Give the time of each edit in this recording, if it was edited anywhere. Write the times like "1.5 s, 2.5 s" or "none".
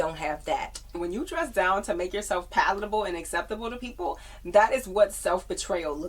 0.9 s